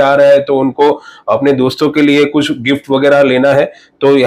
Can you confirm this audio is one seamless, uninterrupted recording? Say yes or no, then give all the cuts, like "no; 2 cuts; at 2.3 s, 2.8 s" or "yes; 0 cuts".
yes; 0 cuts